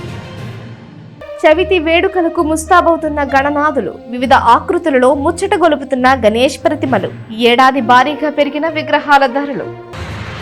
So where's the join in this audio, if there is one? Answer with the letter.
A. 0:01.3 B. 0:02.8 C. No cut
C